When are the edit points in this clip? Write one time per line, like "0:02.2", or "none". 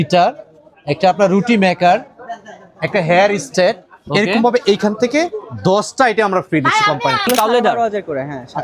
0:07.3

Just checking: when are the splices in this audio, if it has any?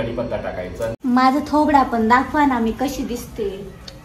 0:01.0

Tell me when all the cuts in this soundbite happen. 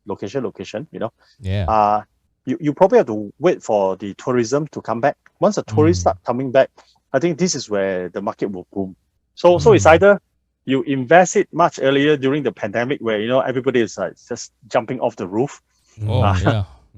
none

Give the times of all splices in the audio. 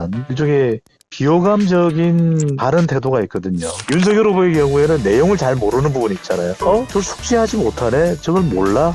0:03.7

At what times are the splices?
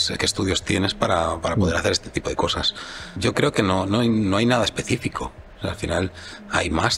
none

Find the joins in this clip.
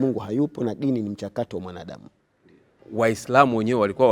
0:02.8

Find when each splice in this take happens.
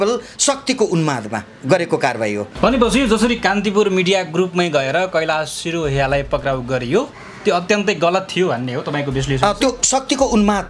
0:02.5

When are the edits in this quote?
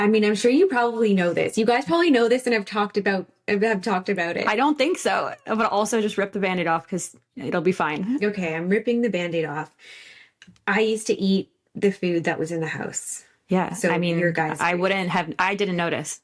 none

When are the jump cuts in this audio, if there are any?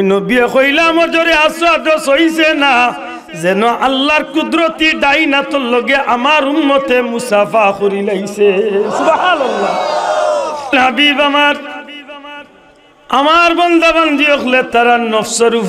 0:10.7

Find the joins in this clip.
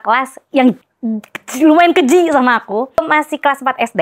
0:00.9
0:03.0

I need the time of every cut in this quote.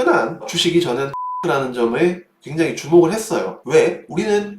0:01.2

